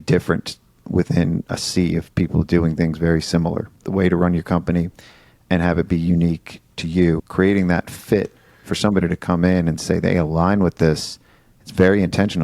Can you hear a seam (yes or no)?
yes